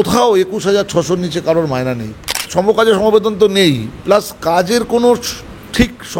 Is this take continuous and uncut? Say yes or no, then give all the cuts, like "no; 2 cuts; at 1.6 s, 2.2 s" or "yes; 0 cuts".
no; 1 cut; at 2.4 s